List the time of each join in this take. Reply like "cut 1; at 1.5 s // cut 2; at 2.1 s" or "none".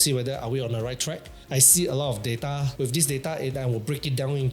cut 1; at 1.4 s